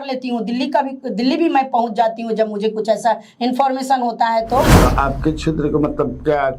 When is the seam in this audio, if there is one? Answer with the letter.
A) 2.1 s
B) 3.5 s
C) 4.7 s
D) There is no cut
C